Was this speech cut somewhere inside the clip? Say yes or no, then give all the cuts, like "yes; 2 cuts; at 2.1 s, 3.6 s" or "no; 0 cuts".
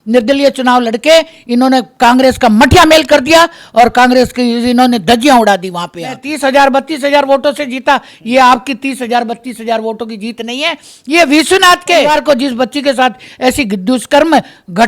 yes; 2 cuts; at 6.3 s, 12.1 s